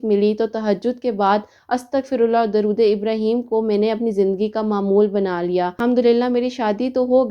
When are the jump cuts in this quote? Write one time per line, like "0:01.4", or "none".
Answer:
0:05.7